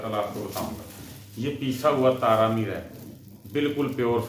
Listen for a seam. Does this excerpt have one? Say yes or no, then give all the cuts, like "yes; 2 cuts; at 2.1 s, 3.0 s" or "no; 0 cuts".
no; 0 cuts